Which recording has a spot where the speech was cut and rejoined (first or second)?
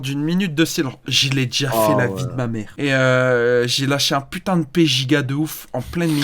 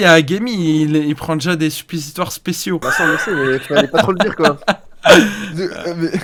first